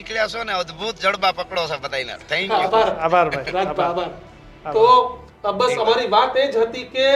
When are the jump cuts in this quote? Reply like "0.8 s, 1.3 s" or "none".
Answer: none

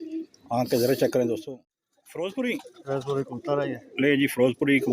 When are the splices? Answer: 1.4 s

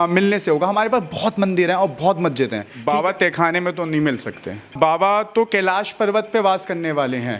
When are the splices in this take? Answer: 2.7 s, 4.7 s

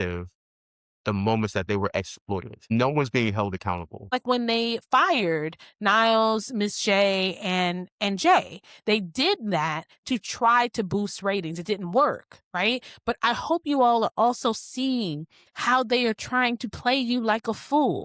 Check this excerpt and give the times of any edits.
2.7 s, 4.1 s

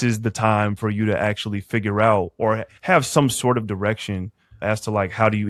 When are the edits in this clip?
none

